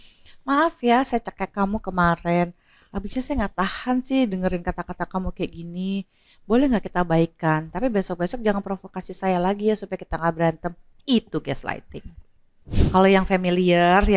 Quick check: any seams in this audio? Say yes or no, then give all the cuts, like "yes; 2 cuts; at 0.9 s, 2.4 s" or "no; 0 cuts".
yes; 1 cut; at 12.7 s